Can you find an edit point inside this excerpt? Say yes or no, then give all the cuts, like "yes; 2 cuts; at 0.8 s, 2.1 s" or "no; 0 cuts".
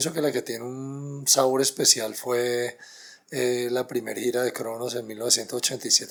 no; 0 cuts